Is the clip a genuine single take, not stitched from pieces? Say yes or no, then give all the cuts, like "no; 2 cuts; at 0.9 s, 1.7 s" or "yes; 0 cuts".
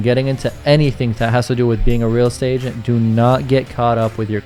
yes; 0 cuts